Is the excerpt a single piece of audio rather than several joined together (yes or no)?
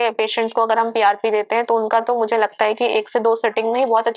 yes